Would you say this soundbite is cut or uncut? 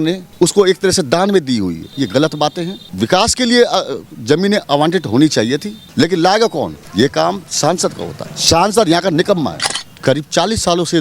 cut